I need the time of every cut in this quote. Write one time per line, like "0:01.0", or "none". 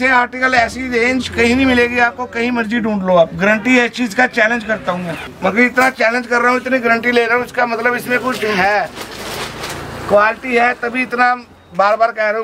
0:05.3